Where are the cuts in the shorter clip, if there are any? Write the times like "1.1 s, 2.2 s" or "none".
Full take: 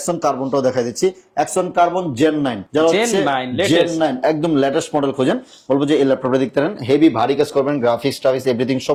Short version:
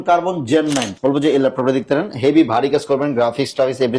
0.9 s

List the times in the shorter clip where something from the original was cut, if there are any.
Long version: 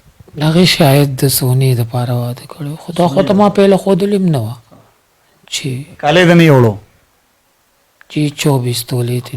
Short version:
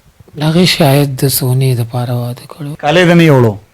2.7 s

